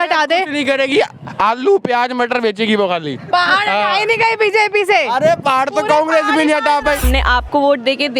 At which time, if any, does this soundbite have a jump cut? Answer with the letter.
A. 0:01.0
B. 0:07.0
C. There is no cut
B